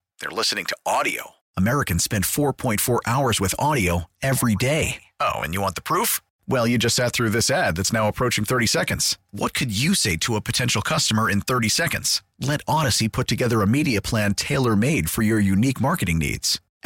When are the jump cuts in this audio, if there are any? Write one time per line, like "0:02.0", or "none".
none